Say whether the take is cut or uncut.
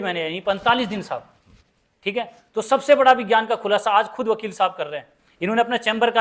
uncut